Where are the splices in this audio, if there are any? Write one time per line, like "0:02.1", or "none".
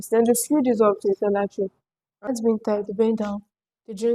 0:02.3